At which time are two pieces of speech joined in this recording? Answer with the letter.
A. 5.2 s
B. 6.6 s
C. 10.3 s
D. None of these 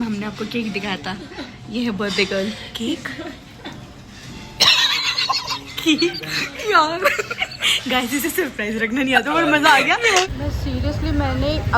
C